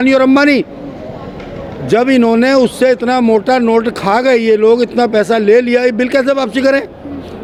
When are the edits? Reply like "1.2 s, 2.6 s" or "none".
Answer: none